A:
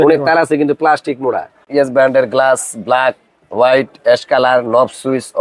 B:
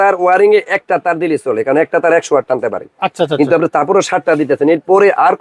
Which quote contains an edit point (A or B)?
A